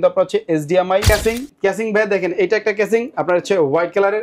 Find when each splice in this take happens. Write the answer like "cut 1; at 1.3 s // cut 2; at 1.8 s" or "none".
cut 1; at 1.0 s